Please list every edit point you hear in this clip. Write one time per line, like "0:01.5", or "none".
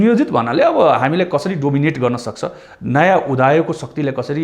none